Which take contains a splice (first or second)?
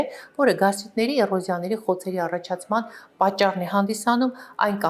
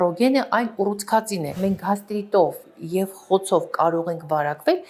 second